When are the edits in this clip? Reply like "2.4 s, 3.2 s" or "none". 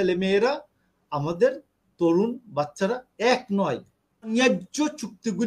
4.3 s